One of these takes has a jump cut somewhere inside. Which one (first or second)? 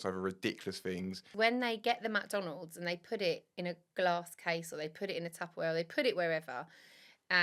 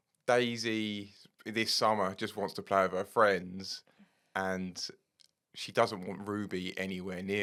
first